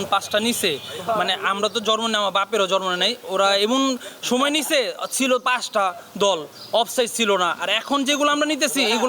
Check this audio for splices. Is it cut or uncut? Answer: uncut